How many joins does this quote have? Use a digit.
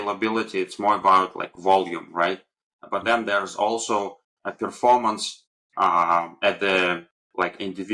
0